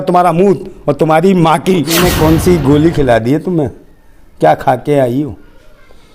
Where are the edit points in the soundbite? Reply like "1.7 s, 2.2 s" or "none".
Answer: 1.9 s